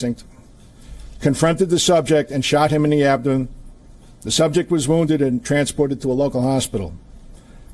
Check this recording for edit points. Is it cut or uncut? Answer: uncut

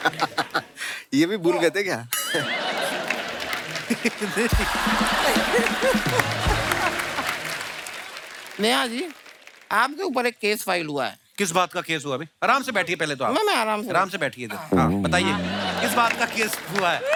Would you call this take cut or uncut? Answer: uncut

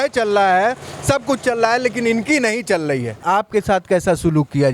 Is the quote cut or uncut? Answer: cut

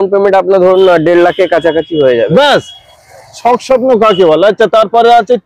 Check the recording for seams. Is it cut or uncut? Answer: uncut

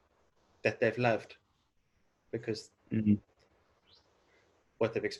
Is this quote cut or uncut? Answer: uncut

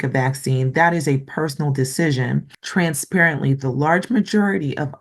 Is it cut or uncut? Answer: cut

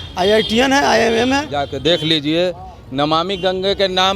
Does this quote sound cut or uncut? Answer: cut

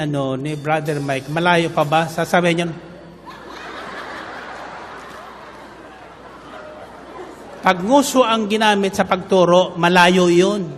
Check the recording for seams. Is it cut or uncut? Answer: uncut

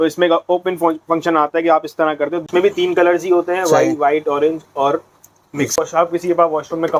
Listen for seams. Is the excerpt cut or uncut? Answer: cut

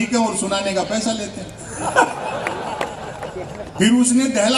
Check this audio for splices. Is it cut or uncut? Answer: cut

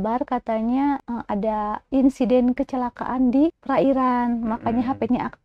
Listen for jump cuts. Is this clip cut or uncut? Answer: cut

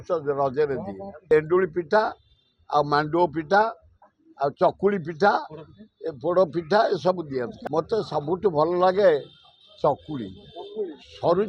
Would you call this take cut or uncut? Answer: cut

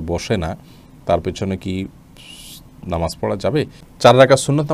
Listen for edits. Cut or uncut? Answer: cut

